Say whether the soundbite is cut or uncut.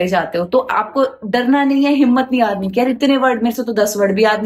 uncut